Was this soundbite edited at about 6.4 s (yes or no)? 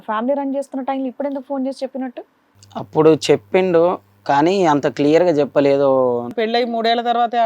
yes